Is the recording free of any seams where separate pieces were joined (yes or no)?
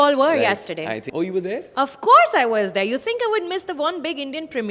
no